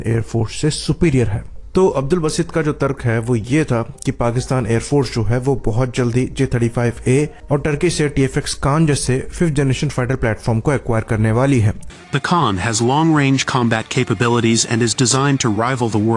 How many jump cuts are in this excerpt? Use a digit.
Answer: 1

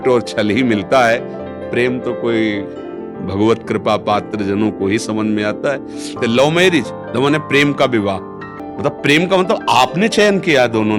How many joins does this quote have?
2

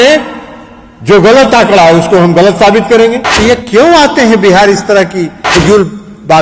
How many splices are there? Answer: 1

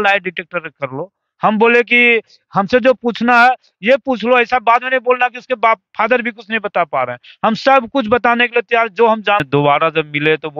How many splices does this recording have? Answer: 1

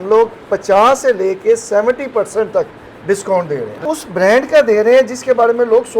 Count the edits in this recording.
1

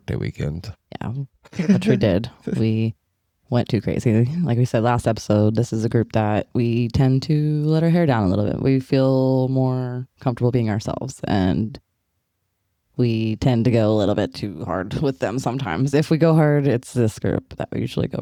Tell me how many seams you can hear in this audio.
0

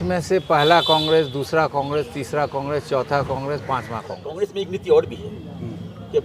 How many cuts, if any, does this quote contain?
1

